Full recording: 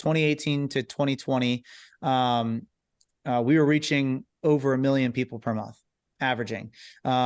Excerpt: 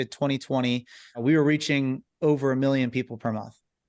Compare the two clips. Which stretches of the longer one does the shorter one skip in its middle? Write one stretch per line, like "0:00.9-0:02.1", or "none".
0:02.0-0:03.4

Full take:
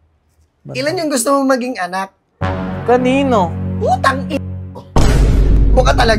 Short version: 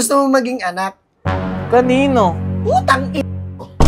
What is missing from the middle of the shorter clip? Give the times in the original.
none

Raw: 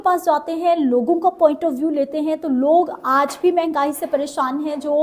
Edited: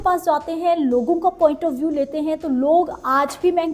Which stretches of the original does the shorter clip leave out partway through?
none

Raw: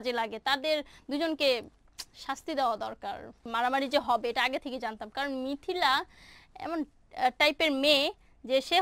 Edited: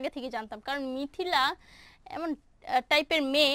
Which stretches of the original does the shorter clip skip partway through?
none

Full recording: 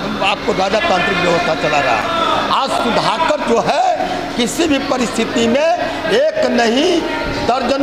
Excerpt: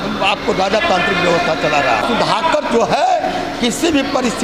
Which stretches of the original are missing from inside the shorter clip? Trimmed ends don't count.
0:02.0-0:02.8

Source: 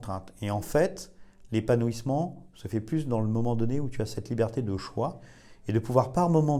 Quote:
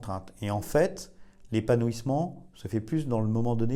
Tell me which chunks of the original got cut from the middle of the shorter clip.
none

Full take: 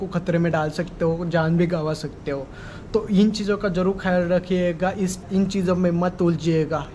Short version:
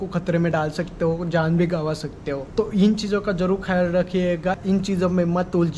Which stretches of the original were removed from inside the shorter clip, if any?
0:02.4-0:02.8
0:04.9-0:05.2

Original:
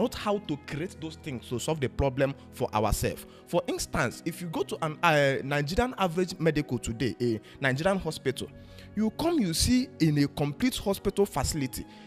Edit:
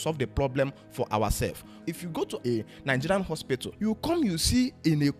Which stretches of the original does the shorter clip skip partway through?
0:03.5-0:06.6
0:08.5-0:08.9

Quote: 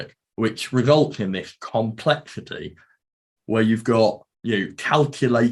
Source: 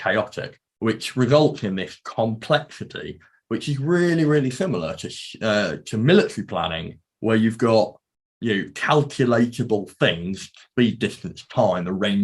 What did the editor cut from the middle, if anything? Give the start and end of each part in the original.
0:03.4-0:06.7
0:08.0-0:08.3

